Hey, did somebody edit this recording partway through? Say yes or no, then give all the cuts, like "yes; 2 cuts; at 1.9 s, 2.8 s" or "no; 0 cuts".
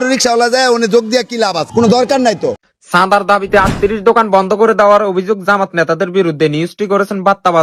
yes; 1 cut; at 2.6 s